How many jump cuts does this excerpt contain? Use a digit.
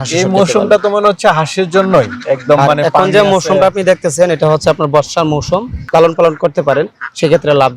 1